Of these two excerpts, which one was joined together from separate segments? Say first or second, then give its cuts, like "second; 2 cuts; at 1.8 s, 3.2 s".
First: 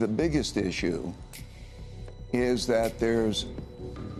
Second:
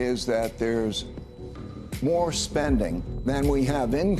second; 1 cut; at 3.1 s